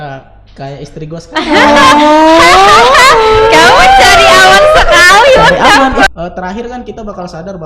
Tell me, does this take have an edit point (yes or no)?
yes